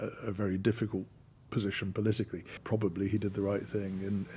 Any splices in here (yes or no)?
yes